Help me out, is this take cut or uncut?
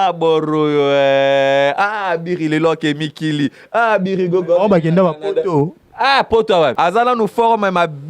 cut